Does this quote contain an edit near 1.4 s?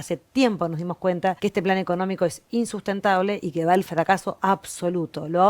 yes; 1 cut; at 1.4 s

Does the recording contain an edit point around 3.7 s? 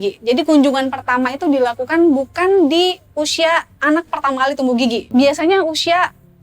no; 1 cut; at 5.1 s

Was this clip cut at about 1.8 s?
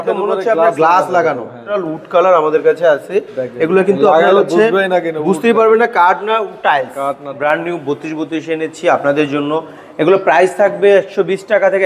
yes; 2 cuts; at 1.8 s, 7.4 s

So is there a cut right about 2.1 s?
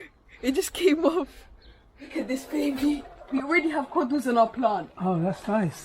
yes; 2 cuts; at 2.1 s, 3.2 s

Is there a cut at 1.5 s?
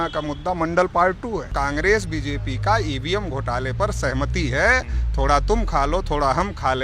yes; 1 cut; at 1.5 s

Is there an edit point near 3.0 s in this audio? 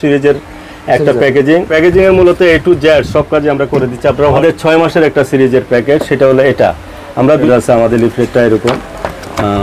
no; 3 cuts; at 1.7 s, 4.4 s, 7.5 s

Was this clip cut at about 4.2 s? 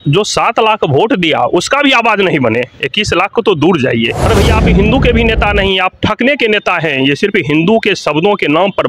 yes; 1 cut; at 4.2 s

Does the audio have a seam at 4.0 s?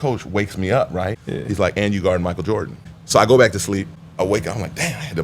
yes; 3 cuts; at 1.2 s, 2.9 s, 4.0 s

